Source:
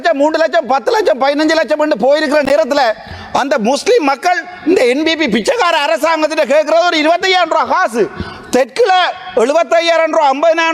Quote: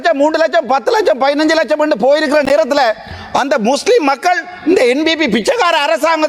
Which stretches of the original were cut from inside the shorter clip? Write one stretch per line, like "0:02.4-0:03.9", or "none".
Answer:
none